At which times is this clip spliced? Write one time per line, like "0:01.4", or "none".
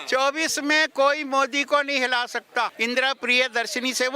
0:02.7